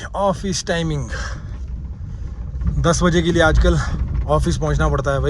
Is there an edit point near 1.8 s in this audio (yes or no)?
no